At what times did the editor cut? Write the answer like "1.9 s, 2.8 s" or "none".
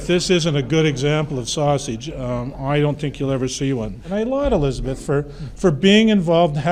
none